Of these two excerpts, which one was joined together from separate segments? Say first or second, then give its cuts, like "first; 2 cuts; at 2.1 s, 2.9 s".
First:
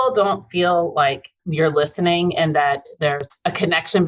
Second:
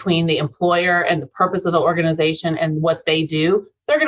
first; 2 cuts; at 1.4 s, 3.3 s